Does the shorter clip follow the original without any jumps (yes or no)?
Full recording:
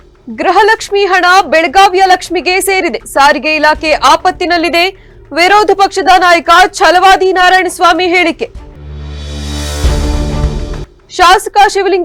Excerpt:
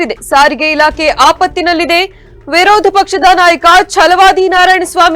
yes